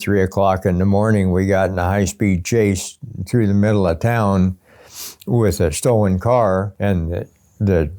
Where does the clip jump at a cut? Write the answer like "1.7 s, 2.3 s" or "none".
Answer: 6.7 s